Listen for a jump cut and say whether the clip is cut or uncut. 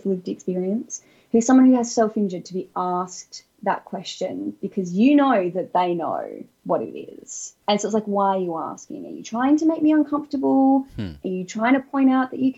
uncut